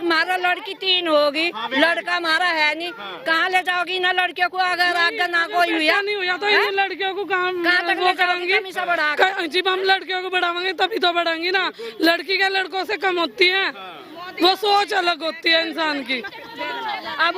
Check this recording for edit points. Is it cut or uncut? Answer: uncut